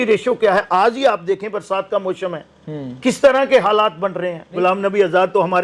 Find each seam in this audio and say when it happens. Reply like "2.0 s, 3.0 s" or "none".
4.6 s